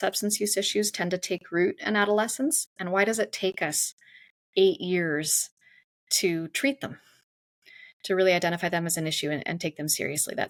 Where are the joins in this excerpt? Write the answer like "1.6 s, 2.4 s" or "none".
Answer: none